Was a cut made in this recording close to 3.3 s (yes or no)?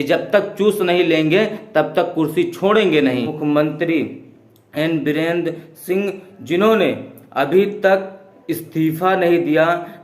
yes